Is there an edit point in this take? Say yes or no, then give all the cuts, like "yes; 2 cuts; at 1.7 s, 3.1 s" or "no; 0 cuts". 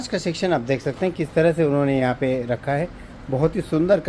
no; 0 cuts